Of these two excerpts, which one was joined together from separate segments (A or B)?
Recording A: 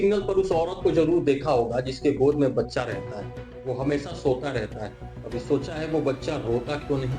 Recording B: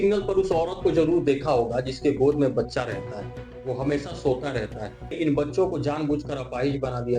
B